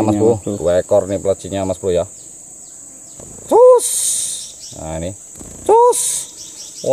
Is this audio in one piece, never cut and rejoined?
yes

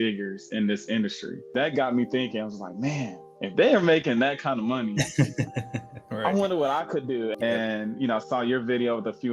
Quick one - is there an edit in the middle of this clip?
yes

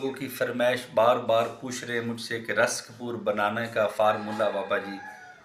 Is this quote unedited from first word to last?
yes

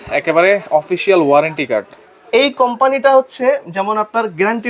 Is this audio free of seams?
yes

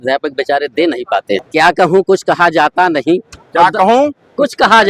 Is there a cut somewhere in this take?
yes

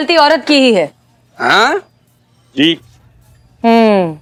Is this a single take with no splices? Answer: yes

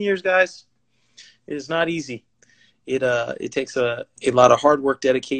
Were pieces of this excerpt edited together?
yes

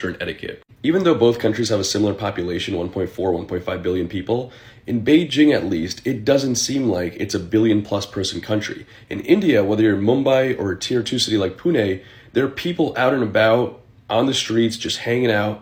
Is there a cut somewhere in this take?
no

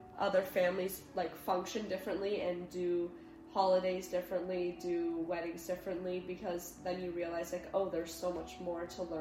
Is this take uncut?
yes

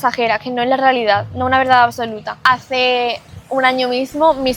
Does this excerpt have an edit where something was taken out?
yes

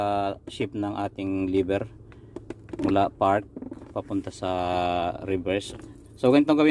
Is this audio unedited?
no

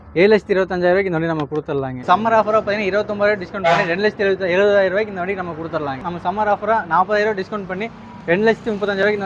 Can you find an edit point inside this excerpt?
yes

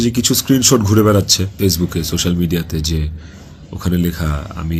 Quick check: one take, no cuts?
yes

